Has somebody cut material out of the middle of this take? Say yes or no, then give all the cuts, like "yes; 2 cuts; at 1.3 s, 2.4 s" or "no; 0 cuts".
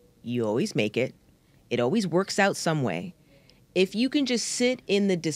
no; 0 cuts